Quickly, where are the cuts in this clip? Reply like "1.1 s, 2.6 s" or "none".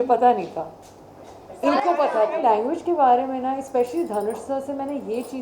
2.4 s